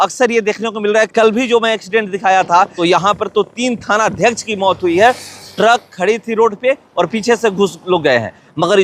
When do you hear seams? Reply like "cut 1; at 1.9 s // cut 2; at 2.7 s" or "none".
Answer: cut 1; at 2.7 s